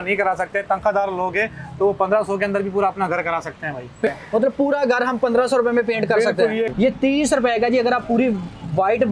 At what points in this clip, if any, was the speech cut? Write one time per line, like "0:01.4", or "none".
0:04.1
0:06.7